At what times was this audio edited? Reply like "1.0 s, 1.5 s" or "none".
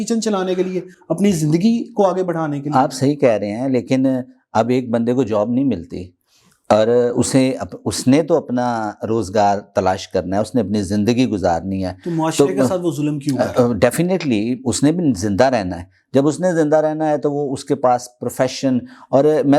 none